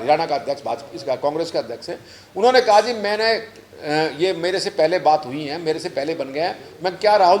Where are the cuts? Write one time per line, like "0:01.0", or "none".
none